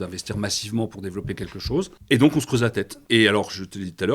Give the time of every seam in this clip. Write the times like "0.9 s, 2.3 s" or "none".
2.0 s, 2.9 s